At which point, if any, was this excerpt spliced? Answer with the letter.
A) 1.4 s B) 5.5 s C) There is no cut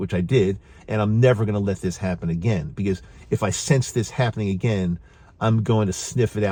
C